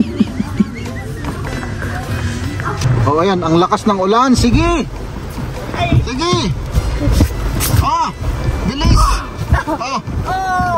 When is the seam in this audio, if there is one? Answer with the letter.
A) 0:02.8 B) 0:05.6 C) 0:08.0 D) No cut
A